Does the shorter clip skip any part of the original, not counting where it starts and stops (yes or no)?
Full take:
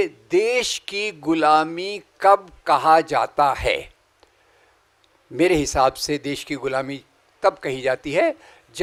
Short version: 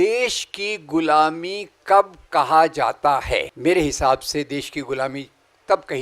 yes